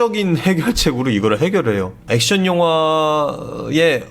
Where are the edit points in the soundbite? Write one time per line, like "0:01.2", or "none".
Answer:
0:02.0